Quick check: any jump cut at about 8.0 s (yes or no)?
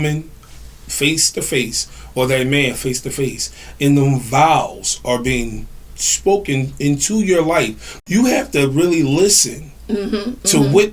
yes